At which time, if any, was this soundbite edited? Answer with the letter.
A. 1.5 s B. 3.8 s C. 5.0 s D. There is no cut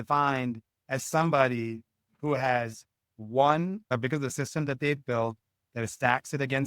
B